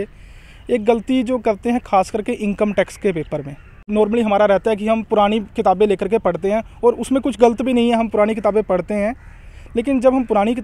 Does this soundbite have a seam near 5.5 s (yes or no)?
no